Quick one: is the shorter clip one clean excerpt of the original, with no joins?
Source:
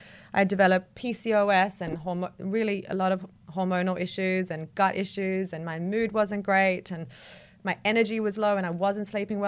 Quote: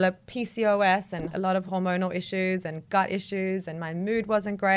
no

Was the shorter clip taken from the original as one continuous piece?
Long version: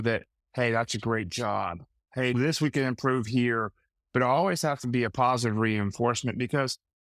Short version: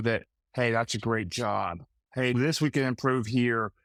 yes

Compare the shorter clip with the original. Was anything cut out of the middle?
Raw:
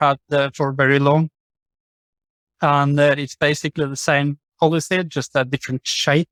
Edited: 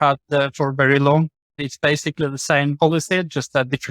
yes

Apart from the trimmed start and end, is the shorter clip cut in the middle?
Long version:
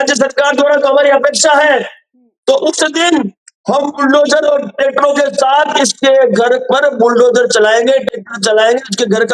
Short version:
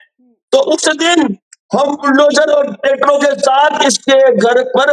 no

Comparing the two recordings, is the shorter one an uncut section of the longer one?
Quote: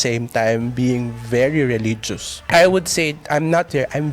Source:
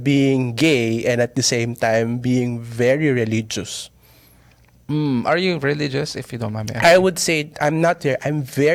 no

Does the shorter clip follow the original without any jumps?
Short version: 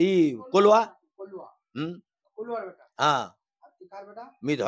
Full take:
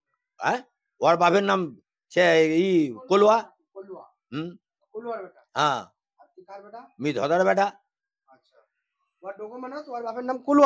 yes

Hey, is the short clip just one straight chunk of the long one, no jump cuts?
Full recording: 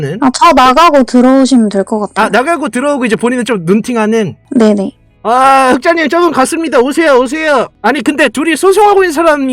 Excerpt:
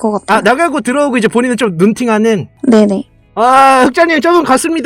yes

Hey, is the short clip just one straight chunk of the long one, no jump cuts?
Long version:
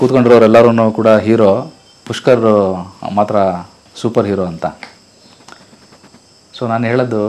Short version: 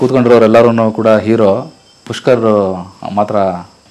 yes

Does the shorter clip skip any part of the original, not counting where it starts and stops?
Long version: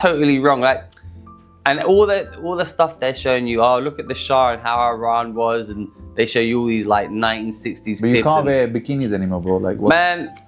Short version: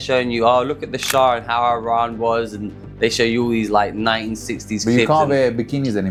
no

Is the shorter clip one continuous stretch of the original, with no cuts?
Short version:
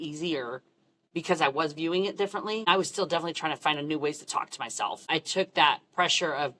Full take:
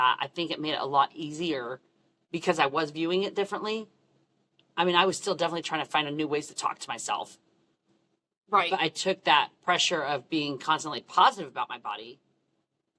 no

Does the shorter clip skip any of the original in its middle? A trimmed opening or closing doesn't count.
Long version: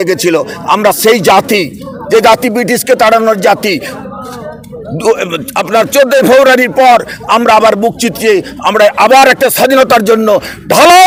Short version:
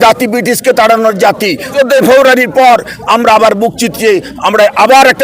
yes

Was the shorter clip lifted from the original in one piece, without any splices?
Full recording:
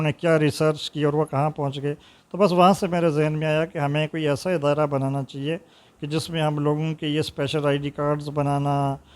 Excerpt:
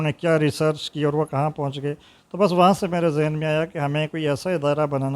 yes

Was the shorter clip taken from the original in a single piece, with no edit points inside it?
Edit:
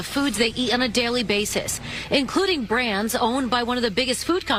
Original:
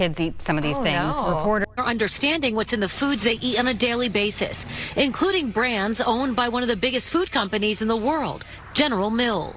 yes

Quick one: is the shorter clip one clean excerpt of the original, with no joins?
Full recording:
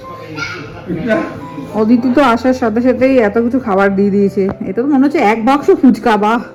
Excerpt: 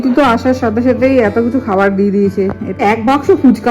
no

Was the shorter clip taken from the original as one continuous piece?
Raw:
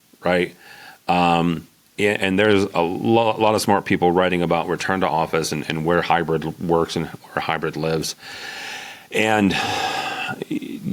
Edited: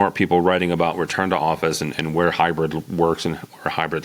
yes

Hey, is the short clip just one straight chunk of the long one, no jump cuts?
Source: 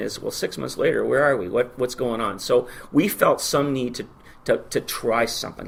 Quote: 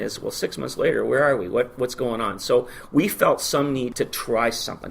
no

